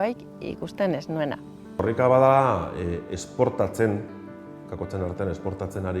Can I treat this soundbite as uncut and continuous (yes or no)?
no